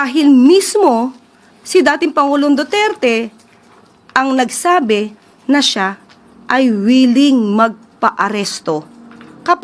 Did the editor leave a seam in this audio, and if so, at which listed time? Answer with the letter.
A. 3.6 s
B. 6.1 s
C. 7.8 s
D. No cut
D